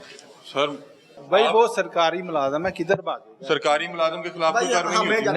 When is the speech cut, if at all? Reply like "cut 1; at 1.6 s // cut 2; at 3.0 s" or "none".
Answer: cut 1; at 1.1 s